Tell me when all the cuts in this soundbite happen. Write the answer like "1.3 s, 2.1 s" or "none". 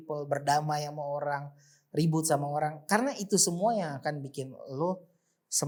none